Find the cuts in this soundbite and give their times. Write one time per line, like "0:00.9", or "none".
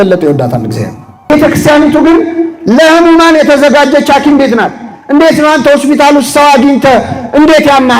0:01.3